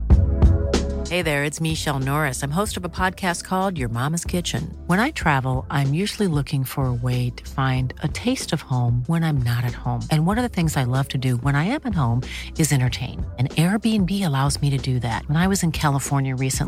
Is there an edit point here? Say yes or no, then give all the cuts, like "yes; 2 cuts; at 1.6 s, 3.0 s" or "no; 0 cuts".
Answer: no; 0 cuts